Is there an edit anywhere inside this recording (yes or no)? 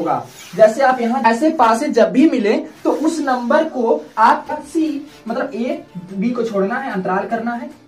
yes